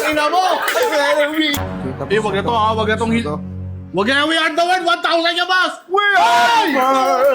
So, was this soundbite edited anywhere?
yes; 1 cut; at 1.5 s

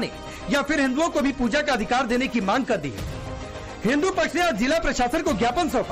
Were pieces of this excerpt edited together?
no; 0 cuts

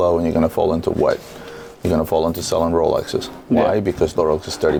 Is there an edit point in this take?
no; 0 cuts

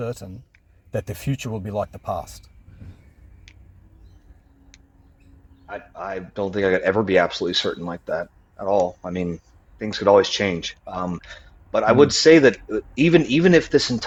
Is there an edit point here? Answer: no; 0 cuts

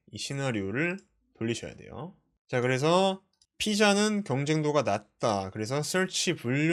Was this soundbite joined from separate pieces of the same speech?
no; 0 cuts

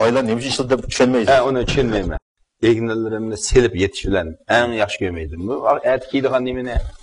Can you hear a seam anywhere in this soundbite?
yes; 1 cut; at 2.1 s

